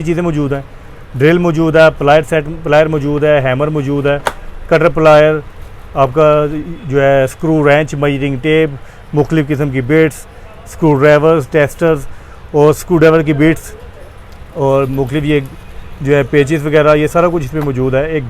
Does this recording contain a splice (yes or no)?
no